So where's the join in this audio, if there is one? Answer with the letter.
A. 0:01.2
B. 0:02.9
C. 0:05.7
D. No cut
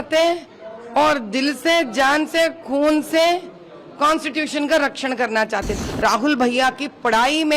C